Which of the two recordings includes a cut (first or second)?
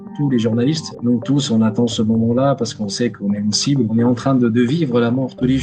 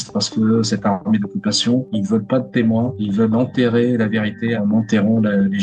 first